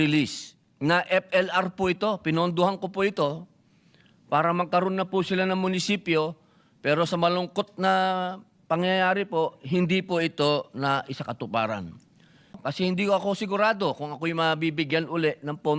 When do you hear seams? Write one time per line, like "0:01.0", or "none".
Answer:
0:12.6